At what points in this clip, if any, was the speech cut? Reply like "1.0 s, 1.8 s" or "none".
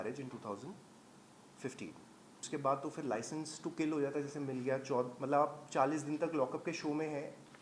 2.3 s